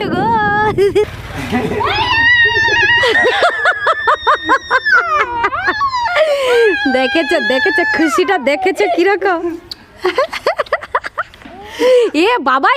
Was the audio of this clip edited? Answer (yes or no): yes